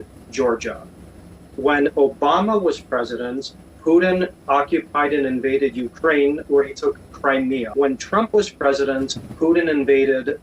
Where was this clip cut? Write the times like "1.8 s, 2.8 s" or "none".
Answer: 7.7 s

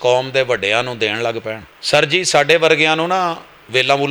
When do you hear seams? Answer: 1.7 s

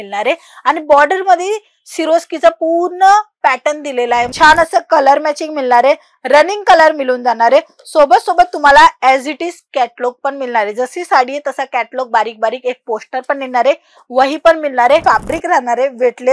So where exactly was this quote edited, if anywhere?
4.3 s, 15.0 s

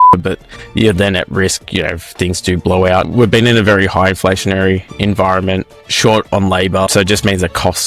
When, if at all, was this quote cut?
3.1 s, 6.9 s

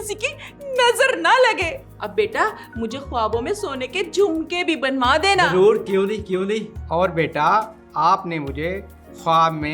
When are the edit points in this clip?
none

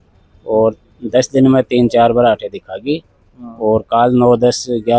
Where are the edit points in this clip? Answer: none

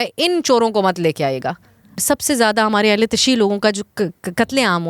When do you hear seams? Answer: 2.0 s

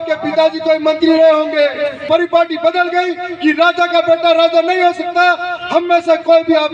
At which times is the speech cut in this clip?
2.0 s

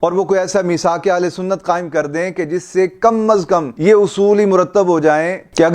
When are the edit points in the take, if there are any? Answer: none

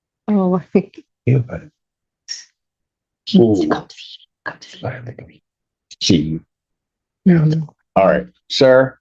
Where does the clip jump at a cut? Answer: none

